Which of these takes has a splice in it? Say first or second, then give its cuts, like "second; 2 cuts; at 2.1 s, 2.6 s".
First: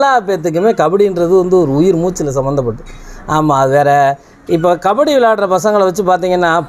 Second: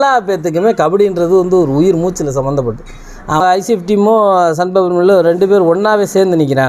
second; 1 cut; at 3.4 s